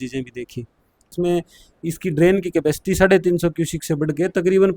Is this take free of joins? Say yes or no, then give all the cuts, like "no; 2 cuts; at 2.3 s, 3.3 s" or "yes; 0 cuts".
no; 1 cut; at 1.1 s